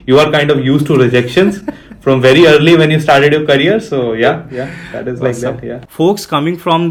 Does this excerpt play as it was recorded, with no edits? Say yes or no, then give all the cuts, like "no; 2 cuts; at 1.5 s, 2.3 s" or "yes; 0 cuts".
yes; 0 cuts